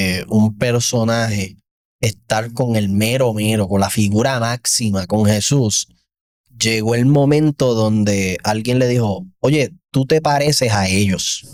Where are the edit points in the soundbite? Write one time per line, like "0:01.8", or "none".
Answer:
none

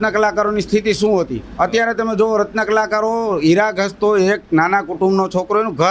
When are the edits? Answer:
none

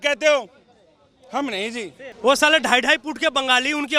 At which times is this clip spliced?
0:02.0

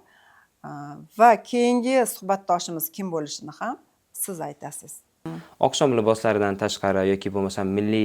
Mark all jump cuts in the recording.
0:05.0

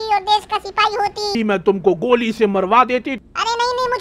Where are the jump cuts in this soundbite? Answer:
0:01.3
0:03.3

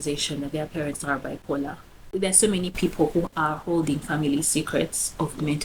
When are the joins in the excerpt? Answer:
0:02.2

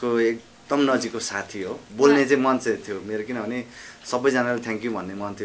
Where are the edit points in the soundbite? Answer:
0:01.8

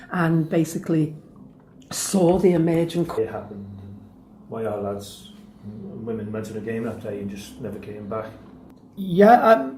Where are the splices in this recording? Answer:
none

